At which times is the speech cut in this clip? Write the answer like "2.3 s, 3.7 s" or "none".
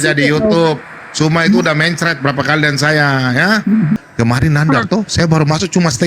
4.0 s